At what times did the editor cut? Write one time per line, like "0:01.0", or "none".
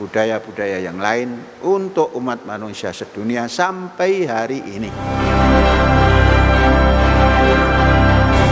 0:04.9